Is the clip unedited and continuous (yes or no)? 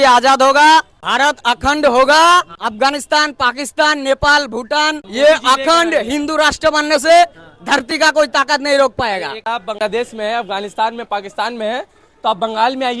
no